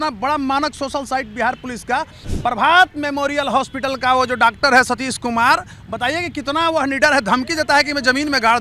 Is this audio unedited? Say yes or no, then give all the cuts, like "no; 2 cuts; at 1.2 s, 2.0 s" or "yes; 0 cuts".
no; 1 cut; at 2.2 s